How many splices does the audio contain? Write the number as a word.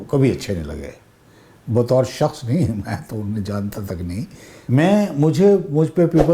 one